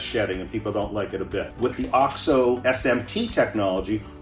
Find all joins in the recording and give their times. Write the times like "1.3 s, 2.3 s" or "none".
1.5 s